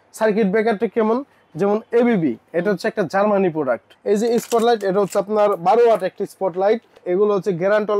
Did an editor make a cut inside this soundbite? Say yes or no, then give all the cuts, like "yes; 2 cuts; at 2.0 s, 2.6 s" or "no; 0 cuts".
yes; 2 cuts; at 3.9 s, 7.0 s